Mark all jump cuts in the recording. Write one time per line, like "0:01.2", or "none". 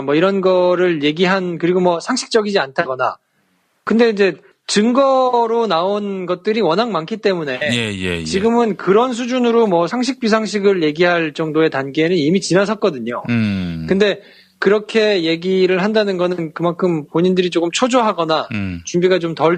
0:16.5